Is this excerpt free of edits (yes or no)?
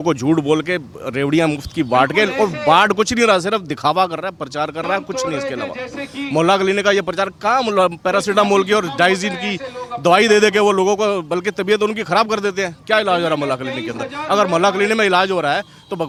yes